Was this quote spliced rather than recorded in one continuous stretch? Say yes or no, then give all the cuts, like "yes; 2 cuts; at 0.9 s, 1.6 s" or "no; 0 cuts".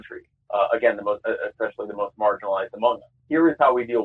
yes; 1 cut; at 3.1 s